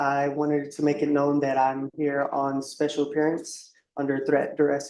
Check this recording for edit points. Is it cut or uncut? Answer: uncut